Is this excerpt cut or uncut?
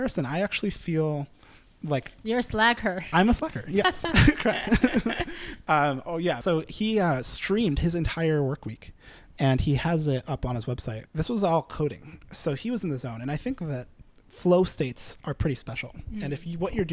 cut